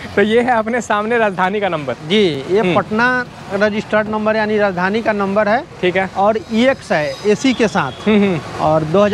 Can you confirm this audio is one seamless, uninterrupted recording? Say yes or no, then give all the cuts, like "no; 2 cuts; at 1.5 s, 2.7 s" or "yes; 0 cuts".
yes; 0 cuts